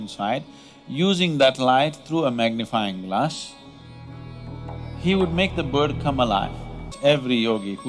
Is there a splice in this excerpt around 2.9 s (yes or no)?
no